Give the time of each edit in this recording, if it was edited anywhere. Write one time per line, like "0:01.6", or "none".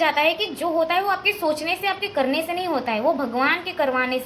none